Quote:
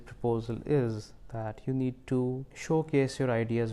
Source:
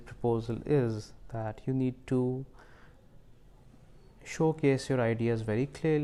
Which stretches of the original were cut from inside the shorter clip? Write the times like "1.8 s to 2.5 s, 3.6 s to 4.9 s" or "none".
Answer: 2.5 s to 4.2 s